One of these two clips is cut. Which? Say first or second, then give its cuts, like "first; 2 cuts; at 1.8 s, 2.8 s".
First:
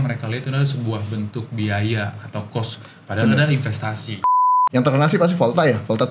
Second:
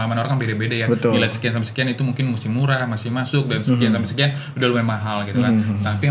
first; 1 cut; at 4.5 s